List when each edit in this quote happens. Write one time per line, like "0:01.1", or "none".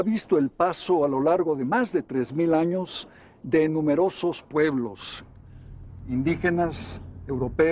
none